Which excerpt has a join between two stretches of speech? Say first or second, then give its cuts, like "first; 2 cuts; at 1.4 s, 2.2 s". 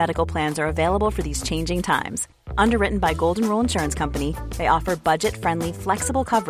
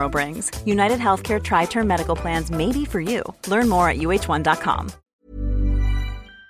second; 1 cut; at 5.0 s